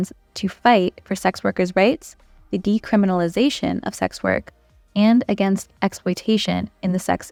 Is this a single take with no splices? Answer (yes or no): yes